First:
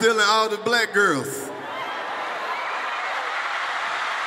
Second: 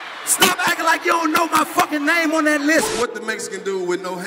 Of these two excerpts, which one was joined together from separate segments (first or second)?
second